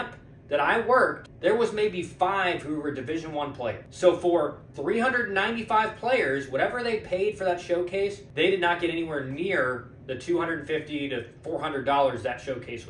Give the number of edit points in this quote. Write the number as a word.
four